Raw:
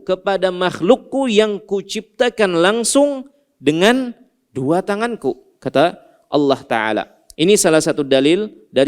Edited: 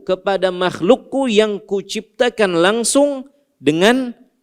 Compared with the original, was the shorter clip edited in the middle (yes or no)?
no